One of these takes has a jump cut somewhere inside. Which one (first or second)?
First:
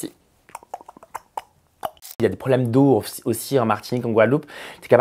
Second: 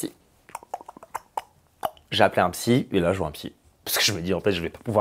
first